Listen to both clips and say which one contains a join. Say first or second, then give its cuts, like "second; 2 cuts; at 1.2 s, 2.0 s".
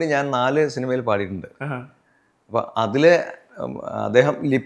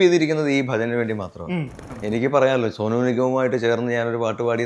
second; 1 cut; at 1.9 s